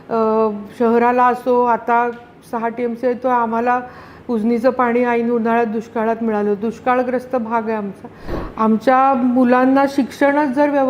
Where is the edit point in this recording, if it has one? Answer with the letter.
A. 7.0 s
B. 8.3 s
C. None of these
B